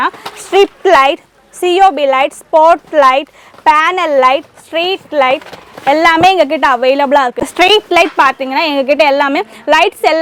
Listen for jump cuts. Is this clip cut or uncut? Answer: uncut